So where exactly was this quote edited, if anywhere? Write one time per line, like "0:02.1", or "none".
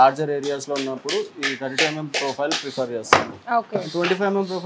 none